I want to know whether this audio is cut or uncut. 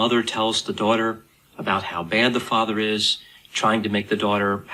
uncut